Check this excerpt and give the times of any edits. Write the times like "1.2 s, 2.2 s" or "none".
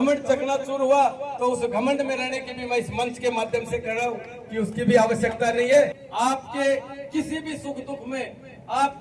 6.0 s